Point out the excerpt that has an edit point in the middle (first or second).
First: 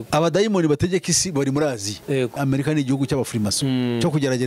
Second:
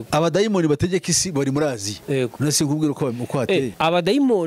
first